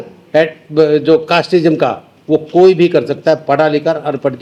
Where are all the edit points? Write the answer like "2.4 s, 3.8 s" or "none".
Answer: none